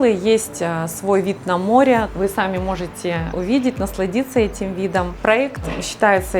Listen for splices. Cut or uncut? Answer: cut